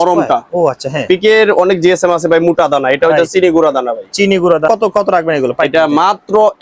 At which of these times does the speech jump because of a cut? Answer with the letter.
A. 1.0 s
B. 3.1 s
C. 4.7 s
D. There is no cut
C